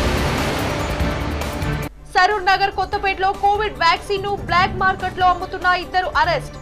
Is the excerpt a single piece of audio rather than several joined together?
no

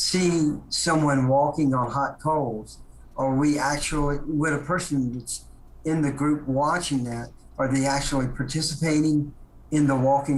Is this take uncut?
yes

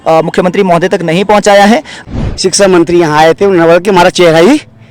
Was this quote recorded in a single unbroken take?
no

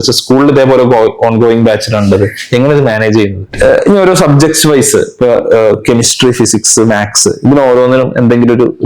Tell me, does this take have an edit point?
yes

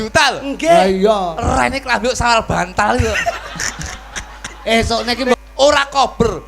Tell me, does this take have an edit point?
yes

